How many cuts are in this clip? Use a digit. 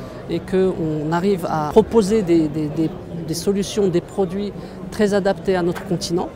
1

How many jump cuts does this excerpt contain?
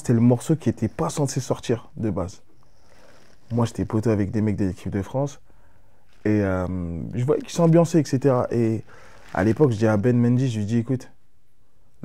0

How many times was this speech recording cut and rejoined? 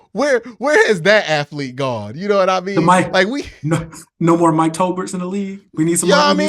0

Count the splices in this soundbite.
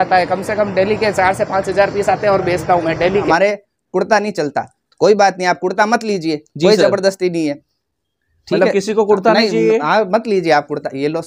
1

